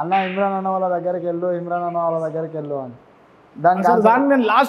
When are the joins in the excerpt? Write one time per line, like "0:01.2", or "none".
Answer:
none